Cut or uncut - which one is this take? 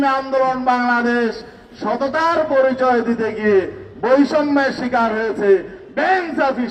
uncut